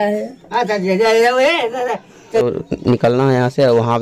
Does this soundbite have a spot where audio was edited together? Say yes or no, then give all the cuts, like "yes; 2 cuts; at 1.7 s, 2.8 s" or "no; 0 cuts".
yes; 1 cut; at 2.4 s